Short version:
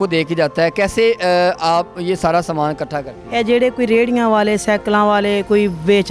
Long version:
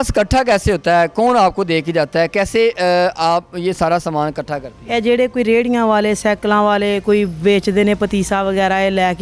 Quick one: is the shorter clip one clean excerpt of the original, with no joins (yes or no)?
yes